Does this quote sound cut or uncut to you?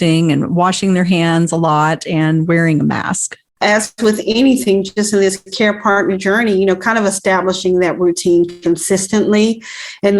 cut